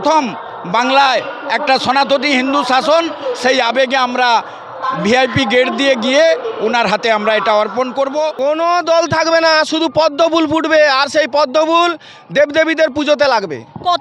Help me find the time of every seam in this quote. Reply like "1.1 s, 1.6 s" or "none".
8.3 s